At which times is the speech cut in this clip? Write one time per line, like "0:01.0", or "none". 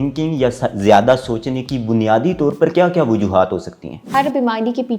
0:04.1